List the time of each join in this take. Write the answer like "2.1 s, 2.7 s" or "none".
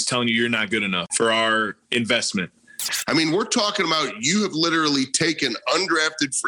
1.1 s, 2.9 s

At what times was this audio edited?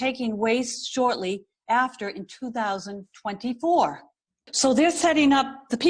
4.5 s

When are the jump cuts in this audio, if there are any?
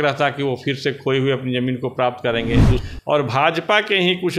2.8 s

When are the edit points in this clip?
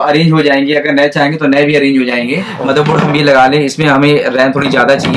2.5 s

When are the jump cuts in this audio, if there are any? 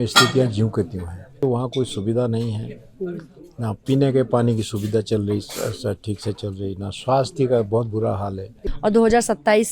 1.4 s, 8.6 s

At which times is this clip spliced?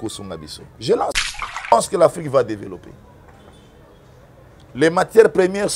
1.7 s

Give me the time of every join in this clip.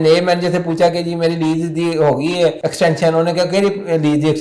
2.6 s

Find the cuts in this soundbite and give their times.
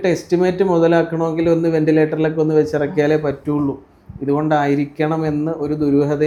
none

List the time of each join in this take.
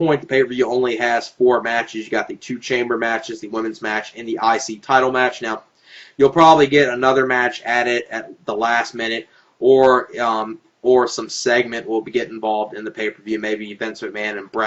9.6 s

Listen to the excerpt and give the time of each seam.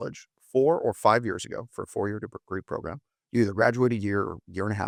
none

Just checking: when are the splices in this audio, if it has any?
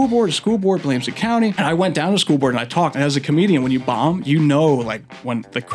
1.6 s

